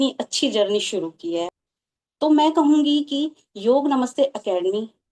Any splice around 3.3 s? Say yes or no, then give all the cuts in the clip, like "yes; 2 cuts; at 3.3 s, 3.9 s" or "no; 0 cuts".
no; 1 cut; at 1.5 s